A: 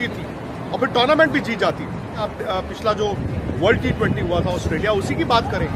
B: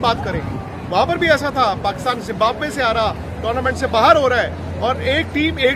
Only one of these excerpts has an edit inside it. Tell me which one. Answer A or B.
A